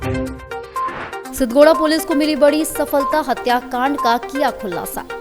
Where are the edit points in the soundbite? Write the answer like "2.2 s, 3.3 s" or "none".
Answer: 1.3 s